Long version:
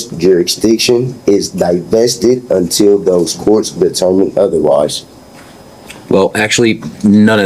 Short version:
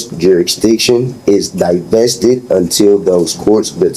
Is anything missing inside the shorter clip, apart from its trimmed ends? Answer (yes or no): no